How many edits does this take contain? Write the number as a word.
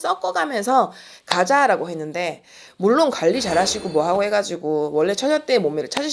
one